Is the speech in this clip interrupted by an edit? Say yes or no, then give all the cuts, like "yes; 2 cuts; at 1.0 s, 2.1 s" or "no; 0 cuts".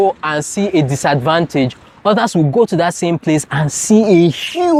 no; 0 cuts